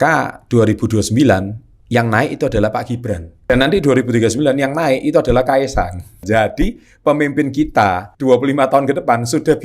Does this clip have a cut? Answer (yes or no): yes